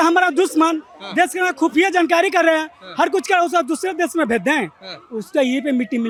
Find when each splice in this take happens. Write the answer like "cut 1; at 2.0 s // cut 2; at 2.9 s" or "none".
none